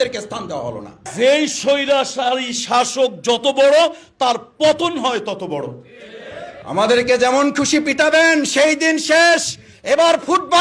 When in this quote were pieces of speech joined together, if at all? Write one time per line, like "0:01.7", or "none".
0:01.1
0:06.6

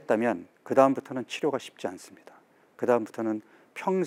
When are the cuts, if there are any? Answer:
none

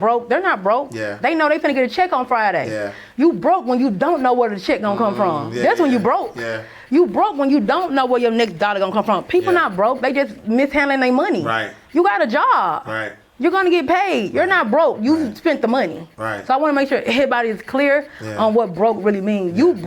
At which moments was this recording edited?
none

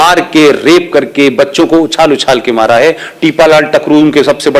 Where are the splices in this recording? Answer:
none

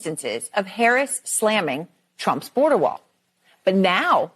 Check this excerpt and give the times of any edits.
none

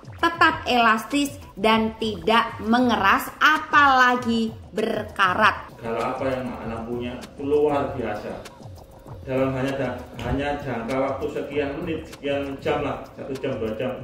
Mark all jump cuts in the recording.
0:05.7

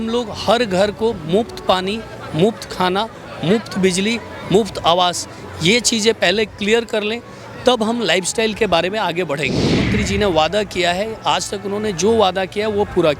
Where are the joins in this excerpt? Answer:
0:09.9

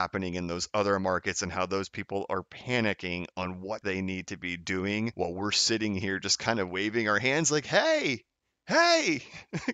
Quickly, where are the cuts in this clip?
0:03.8

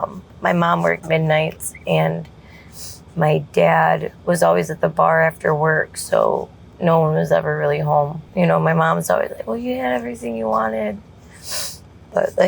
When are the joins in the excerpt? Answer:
0:08.2

